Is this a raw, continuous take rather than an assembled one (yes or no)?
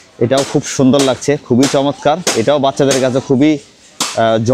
yes